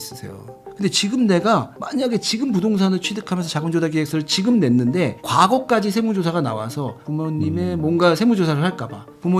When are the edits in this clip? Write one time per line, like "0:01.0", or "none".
none

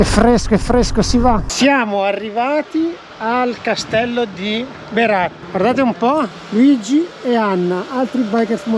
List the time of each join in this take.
0:01.5

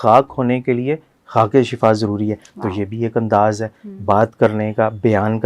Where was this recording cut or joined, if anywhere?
none

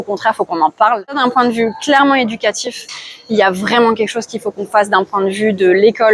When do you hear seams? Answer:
0:01.1

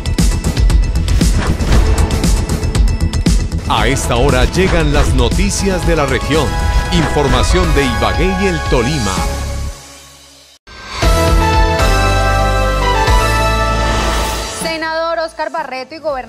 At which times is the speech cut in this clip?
0:10.5

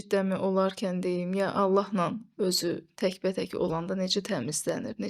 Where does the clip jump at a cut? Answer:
none

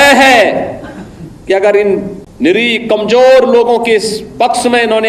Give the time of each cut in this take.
0:02.2

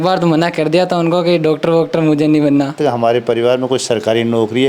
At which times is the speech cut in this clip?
0:02.8

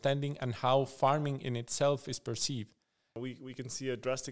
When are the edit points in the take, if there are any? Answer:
0:03.2

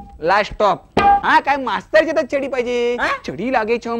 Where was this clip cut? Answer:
0:01.2

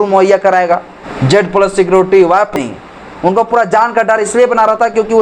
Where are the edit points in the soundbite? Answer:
0:01.0
0:02.5

